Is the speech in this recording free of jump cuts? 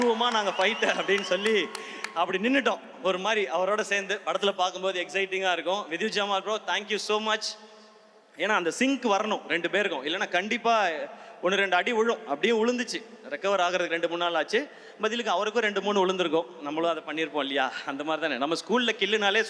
yes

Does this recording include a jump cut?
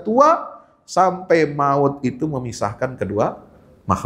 no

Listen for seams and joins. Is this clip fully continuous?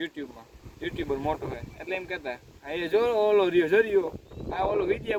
yes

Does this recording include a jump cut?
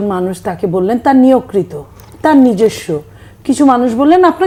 no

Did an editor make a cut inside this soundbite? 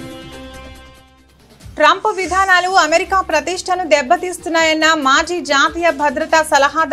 no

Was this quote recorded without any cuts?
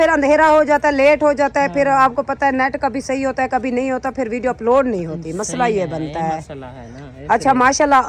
yes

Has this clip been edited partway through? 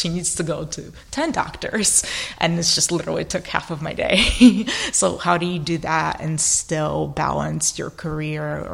no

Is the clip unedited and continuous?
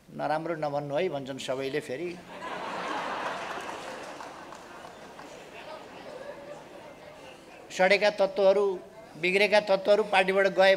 yes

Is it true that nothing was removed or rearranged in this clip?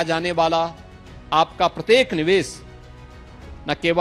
yes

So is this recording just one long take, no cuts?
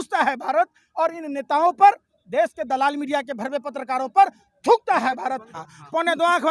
no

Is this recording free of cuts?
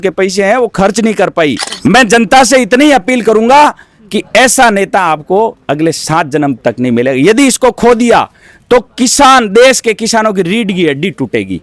no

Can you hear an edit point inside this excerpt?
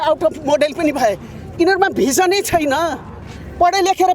no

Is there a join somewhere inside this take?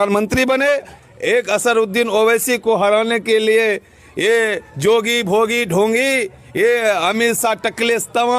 yes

